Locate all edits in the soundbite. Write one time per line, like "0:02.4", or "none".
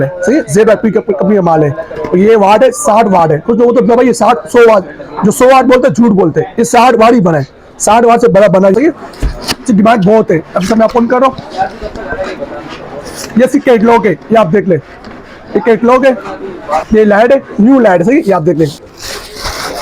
0:08.7
0:16.8
0:18.9